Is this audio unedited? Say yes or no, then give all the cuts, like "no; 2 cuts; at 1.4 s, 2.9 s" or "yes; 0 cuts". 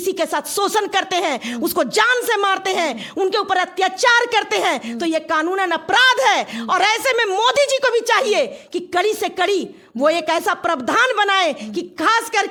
yes; 0 cuts